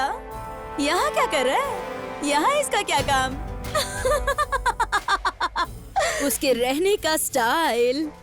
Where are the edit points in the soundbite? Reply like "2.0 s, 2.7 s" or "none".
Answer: none